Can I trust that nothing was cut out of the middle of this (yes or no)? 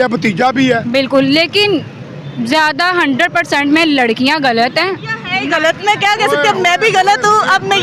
yes